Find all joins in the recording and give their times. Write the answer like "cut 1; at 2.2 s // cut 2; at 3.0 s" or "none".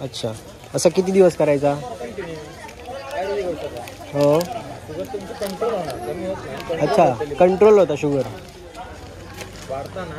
none

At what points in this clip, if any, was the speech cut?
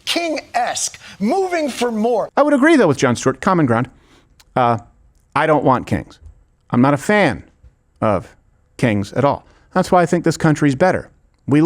cut 1; at 2.3 s

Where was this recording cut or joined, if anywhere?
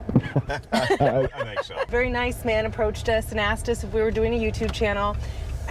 cut 1; at 1.9 s

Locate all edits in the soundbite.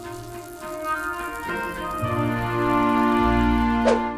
none

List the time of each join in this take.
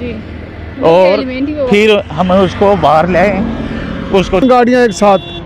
cut 1; at 4.4 s

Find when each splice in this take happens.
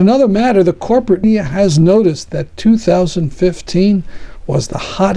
cut 1; at 1.2 s

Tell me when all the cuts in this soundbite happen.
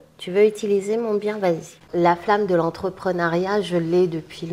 cut 1; at 1.7 s

